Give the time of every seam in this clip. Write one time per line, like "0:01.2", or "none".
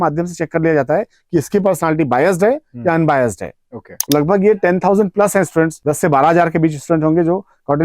0:03.9
0:05.8